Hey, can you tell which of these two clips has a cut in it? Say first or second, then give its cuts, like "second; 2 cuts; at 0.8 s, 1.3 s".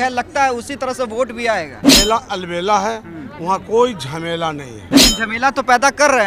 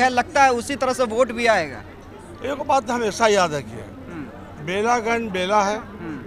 first; 2 cuts; at 1.8 s, 4.9 s